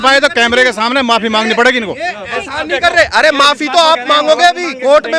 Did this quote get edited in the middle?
no; 0 cuts

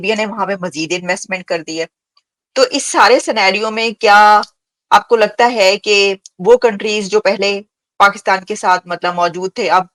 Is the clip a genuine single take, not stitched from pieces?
yes; 0 cuts

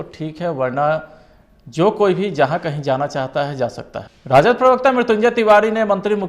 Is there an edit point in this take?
yes; 1 cut; at 4.3 s

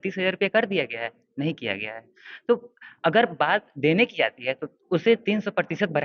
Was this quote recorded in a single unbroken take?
yes; 0 cuts

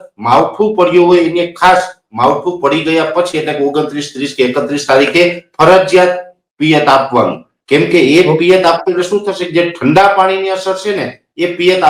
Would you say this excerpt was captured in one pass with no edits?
yes; 0 cuts

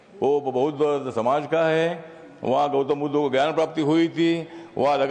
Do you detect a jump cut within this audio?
no; 0 cuts

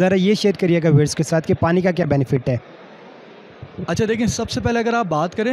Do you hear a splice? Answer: no; 0 cuts

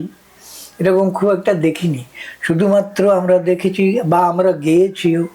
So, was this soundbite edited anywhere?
no; 0 cuts

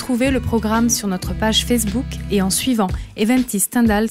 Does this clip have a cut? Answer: no; 0 cuts

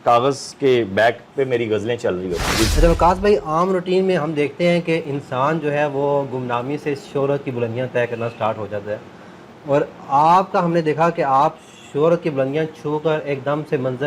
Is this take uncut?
no; 1 cut; at 2.7 s

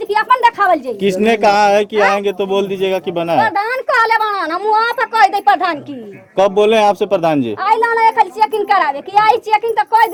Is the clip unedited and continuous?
yes; 0 cuts

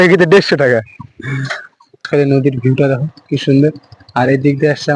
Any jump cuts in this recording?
yes; 1 cut; at 2.0 s

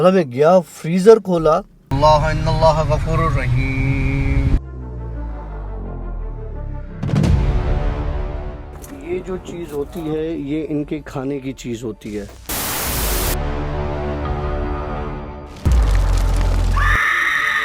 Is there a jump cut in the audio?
yes; 1 cut; at 1.8 s

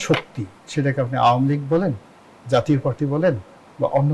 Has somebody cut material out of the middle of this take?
no; 0 cuts

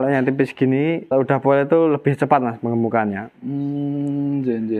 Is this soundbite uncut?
no; 1 cut; at 1.1 s

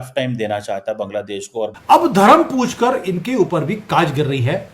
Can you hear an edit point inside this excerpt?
yes; 1 cut; at 1.8 s

